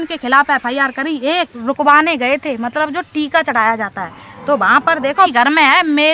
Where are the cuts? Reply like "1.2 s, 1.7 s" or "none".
1.5 s, 5.2 s